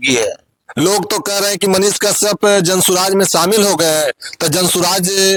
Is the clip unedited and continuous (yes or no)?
yes